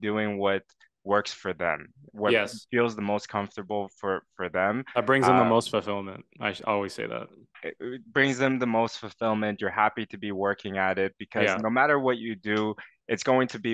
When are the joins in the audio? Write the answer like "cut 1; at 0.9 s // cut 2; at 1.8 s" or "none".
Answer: none